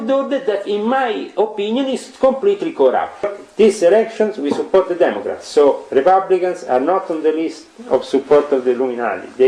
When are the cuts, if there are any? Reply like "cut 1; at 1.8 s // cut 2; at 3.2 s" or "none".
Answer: cut 1; at 3.3 s